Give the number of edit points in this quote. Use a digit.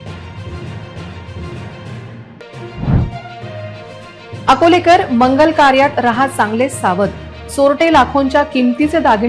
1